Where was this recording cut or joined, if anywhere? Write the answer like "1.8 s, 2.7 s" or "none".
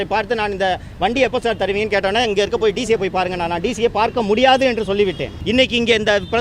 5.3 s